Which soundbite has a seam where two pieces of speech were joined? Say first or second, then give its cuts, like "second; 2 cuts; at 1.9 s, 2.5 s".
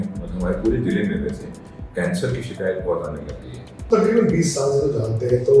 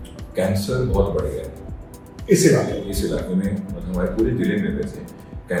first; 1 cut; at 3.8 s